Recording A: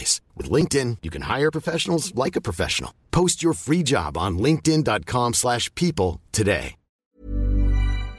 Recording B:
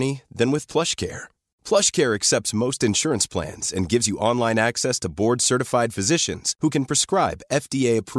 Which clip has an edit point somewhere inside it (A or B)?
A